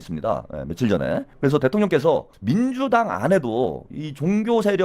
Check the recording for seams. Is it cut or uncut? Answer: cut